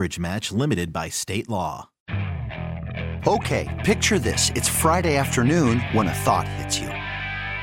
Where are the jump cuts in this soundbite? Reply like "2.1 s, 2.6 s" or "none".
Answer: 1.9 s